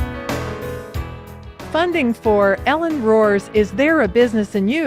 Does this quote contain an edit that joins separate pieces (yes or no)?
no